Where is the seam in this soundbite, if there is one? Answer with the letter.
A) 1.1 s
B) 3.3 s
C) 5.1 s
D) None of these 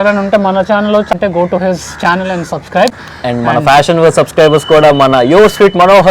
A